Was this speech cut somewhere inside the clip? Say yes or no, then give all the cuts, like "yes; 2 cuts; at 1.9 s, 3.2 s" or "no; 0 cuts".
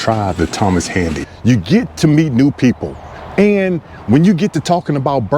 yes; 1 cut; at 1.3 s